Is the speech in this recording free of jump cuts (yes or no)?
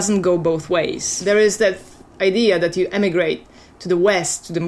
no